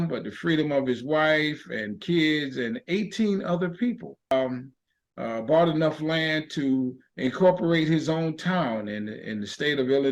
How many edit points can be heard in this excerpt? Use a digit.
1